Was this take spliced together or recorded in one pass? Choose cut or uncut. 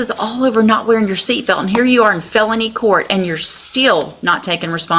uncut